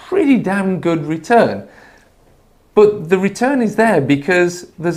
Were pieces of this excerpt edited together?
no; 0 cuts

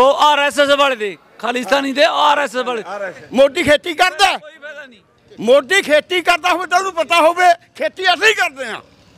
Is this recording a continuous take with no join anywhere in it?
no; 1 cut; at 3.2 s

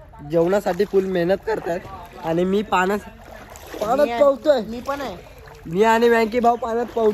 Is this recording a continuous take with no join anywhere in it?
yes; 0 cuts

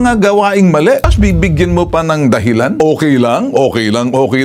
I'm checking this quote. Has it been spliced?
yes; 2 cuts; at 1.1 s, 2.8 s

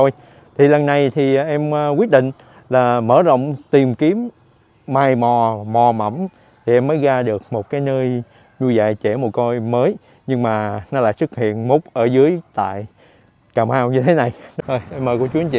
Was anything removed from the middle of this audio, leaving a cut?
yes; 1 cut; at 14.4 s

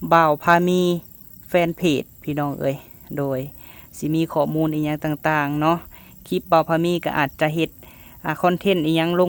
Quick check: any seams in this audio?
no; 0 cuts

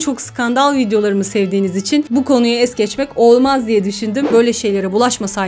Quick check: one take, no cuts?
no; 1 cut; at 4.3 s

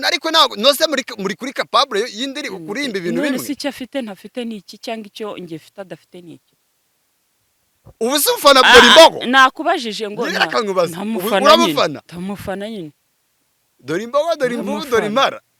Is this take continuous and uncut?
yes; 0 cuts

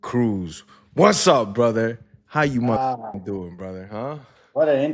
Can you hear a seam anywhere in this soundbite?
no; 0 cuts

